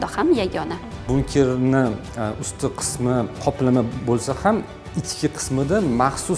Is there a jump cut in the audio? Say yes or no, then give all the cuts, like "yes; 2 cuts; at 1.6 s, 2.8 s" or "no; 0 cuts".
yes; 2 cuts; at 1.1 s, 3.4 s